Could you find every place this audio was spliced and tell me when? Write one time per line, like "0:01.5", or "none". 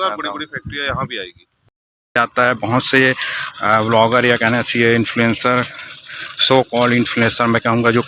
0:02.2